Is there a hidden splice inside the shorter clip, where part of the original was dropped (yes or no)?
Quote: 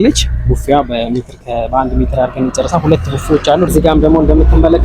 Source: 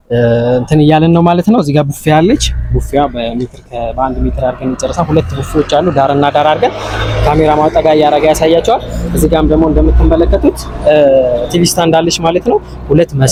yes